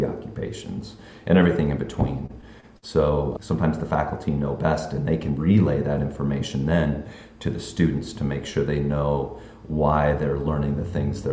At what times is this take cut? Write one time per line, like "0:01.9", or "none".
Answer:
0:03.3